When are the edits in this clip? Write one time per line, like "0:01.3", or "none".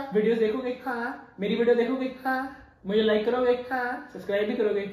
none